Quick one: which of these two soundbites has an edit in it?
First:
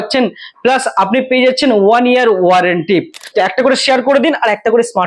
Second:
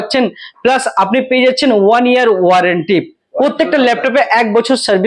first; 1 cut; at 3.2 s

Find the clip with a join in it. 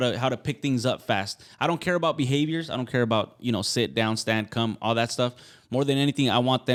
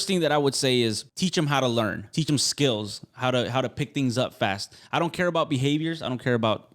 second; 2 cuts; at 1.1 s, 2.2 s

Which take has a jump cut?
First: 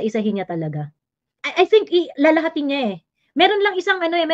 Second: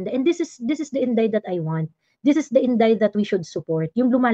first; 1 cut; at 1.4 s

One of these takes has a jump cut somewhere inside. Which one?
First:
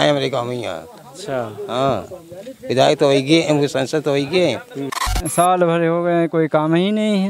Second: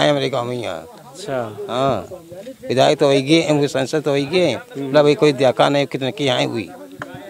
first; 1 cut; at 4.8 s

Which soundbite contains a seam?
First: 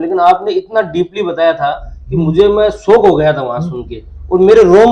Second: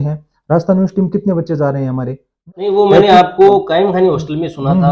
second; 1 cut; at 2.5 s

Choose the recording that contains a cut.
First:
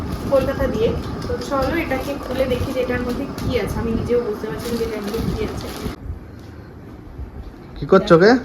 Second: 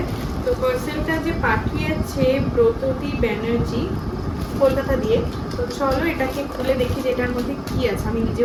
first; 1 cut; at 6.0 s

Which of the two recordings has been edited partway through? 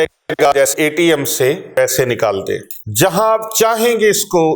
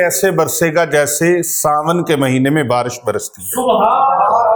first; 2 cuts; at 1.8 s, 2.8 s

